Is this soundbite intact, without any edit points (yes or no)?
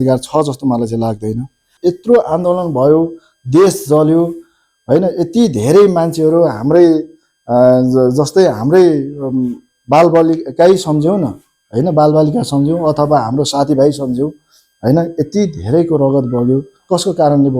no